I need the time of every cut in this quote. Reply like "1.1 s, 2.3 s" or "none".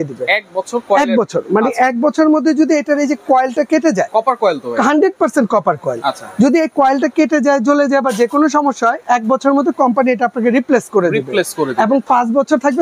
none